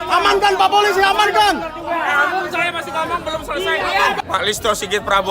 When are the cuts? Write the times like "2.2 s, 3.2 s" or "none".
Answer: 4.2 s